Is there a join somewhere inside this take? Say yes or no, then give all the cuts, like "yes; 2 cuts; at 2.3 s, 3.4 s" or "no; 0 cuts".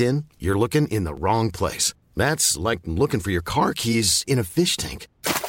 no; 0 cuts